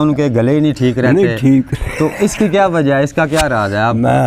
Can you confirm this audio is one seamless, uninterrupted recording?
yes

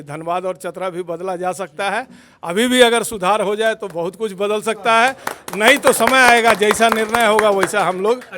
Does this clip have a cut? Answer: no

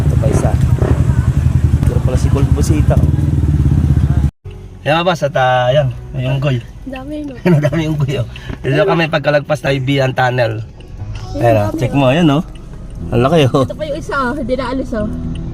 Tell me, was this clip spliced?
yes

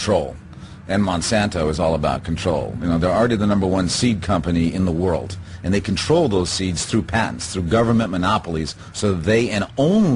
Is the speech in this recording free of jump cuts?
yes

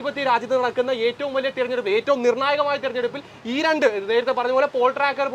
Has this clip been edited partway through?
no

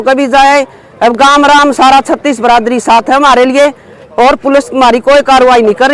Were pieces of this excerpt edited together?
no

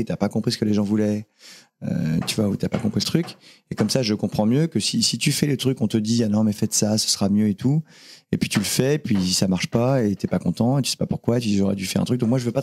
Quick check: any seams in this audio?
no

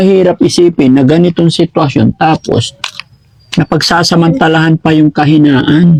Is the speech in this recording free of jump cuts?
yes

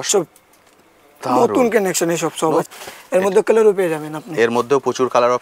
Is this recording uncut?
no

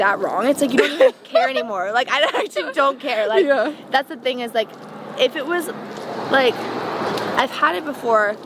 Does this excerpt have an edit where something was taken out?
no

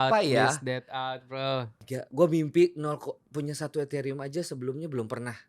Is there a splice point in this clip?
yes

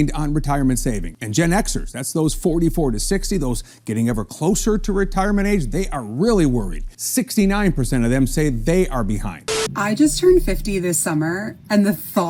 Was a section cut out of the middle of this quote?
yes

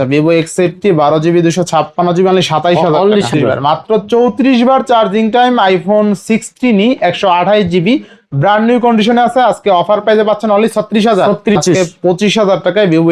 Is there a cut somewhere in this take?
yes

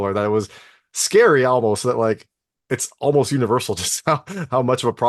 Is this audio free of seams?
yes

